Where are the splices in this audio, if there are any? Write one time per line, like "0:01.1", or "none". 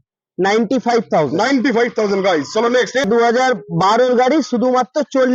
0:03.0

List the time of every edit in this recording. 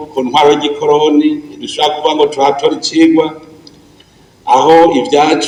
none

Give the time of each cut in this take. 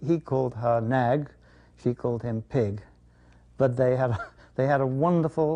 none

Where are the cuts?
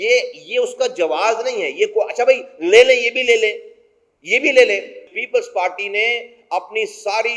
0:05.2

